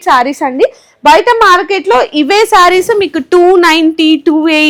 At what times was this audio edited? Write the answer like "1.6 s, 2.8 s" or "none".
none